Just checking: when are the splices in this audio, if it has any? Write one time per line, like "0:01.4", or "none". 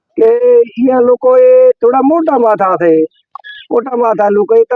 none